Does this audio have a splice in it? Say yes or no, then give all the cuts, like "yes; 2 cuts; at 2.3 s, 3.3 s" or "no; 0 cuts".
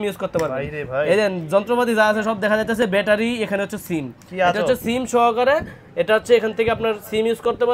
no; 0 cuts